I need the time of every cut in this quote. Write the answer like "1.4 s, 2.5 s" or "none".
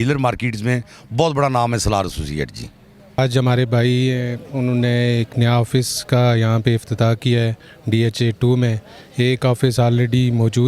none